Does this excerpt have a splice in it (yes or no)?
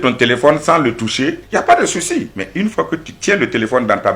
yes